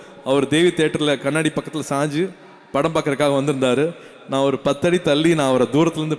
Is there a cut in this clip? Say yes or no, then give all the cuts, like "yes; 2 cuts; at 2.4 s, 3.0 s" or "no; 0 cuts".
no; 0 cuts